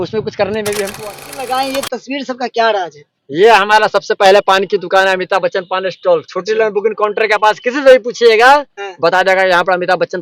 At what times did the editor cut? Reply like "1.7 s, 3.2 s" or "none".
0.9 s